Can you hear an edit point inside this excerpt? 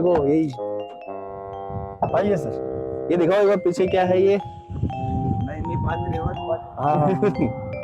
no; 0 cuts

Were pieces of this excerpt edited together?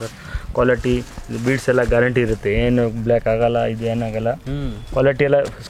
no; 0 cuts

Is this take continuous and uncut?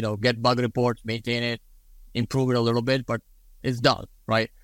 yes; 0 cuts

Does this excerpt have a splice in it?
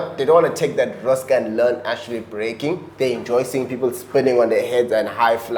no; 0 cuts

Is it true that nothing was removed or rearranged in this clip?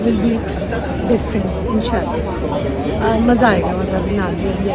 yes; 0 cuts

